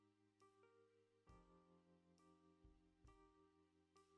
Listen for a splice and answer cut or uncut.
uncut